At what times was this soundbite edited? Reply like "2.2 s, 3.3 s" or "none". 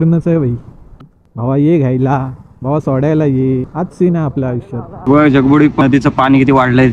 1.0 s, 5.1 s, 5.8 s

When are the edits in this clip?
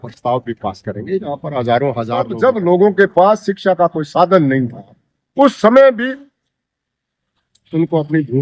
2.3 s

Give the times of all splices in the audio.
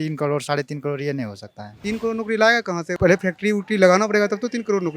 1.8 s

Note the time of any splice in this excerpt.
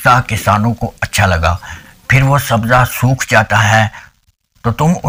none

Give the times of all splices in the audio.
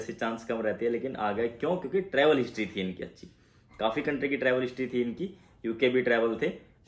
none

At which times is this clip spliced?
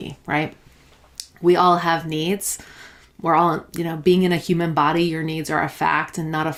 none

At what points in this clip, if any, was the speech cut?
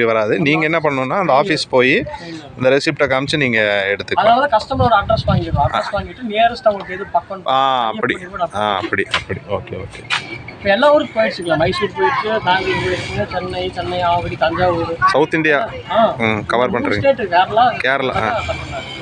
none

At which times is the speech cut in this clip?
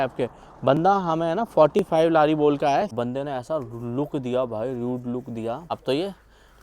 2.9 s, 5.6 s

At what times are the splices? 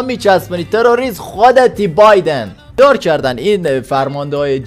2.6 s

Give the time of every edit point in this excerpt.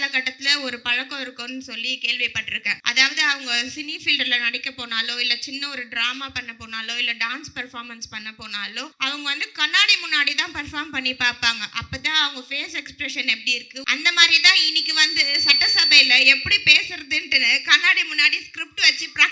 2.7 s, 8.9 s, 13.8 s

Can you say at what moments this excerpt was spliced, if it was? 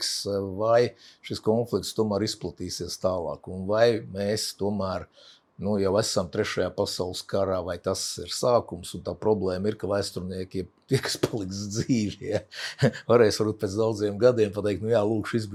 none

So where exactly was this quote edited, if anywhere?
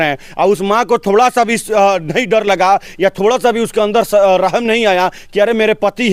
none

